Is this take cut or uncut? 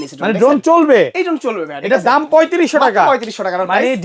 uncut